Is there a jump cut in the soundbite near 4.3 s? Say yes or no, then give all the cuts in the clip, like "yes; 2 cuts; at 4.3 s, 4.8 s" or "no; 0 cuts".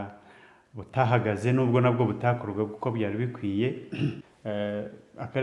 yes; 1 cut; at 4.3 s